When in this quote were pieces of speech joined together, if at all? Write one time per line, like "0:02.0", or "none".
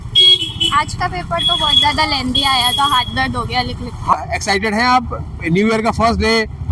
0:04.1